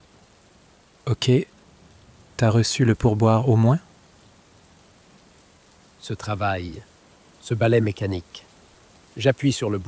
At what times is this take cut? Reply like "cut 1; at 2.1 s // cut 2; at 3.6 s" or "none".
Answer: cut 1; at 1.1 s